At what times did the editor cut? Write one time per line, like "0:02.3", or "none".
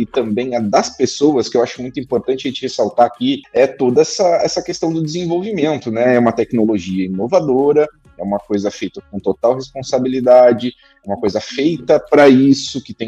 0:03.4